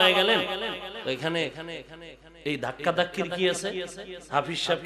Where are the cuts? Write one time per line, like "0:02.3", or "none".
0:00.9